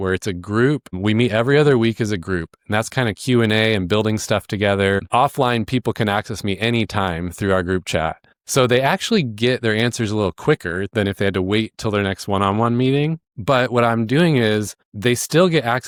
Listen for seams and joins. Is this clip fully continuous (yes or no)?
yes